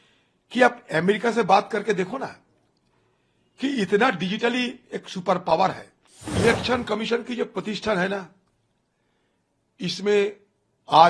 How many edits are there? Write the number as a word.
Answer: one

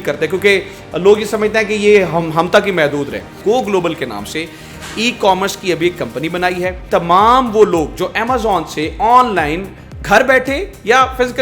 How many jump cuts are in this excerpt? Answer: two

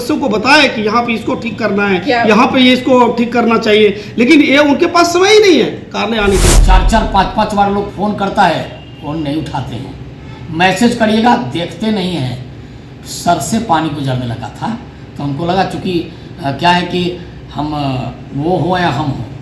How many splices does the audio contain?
one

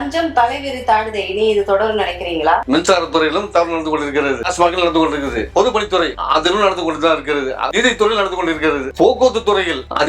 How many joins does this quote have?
three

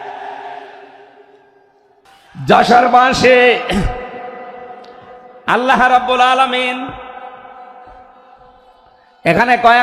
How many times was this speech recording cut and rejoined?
one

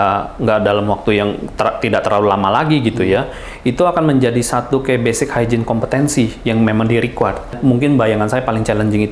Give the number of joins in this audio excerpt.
one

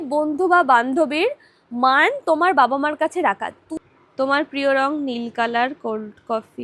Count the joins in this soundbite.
one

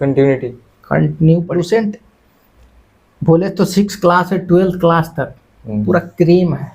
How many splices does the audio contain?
one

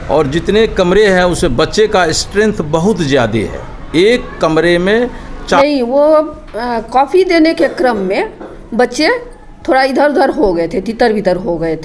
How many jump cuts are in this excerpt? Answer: one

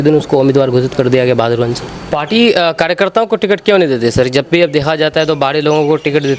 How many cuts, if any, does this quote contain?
one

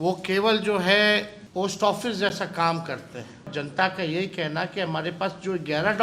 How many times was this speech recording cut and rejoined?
two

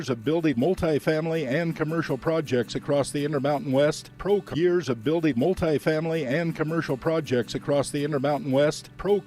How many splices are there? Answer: one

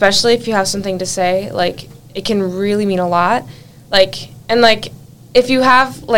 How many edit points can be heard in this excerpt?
zero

